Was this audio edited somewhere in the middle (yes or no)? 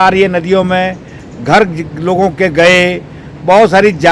no